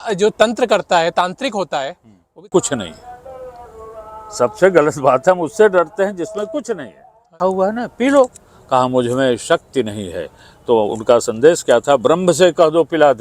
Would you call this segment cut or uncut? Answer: cut